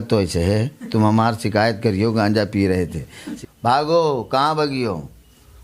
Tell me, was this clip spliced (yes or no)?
yes